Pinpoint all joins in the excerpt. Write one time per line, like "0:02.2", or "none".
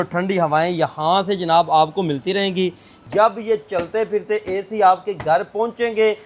0:03.0